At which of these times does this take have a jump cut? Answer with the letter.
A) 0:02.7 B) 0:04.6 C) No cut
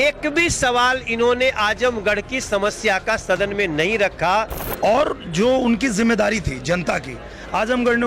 B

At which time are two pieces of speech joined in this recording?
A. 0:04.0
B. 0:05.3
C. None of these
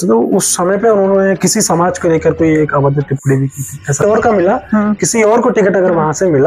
A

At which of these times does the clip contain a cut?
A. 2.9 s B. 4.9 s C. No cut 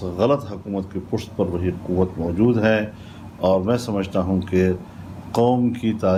C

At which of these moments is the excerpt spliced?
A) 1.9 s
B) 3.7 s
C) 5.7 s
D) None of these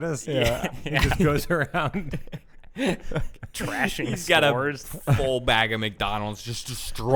D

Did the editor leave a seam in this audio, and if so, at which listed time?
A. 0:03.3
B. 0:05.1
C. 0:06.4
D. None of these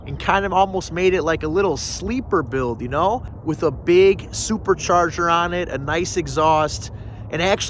A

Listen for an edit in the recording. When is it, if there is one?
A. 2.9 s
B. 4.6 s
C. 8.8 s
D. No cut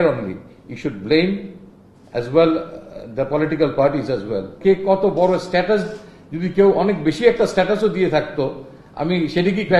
B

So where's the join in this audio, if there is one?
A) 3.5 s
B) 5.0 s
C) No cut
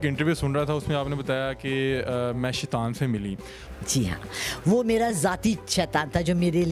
A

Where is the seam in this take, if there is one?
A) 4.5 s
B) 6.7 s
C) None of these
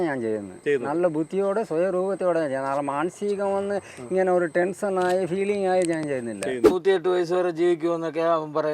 B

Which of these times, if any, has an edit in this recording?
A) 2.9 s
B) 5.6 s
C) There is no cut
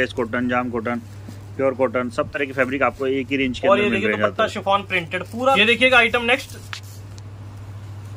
B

